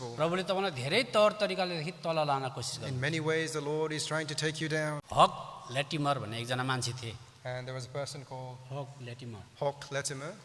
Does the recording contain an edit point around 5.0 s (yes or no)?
yes